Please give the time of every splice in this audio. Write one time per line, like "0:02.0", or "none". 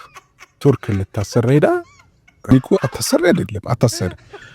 0:02.5